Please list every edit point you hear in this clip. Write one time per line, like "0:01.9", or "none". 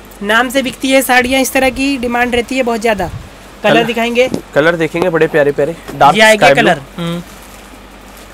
none